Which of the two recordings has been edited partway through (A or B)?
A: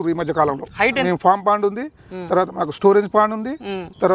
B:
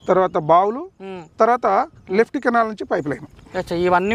A